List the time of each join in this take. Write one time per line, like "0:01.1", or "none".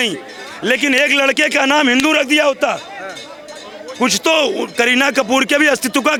none